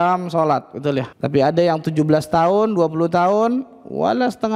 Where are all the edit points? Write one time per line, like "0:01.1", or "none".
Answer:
0:01.2